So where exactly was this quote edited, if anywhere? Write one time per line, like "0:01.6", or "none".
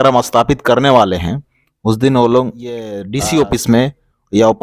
0:03.0